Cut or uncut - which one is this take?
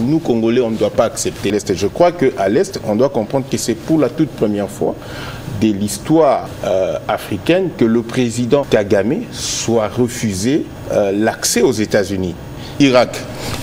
cut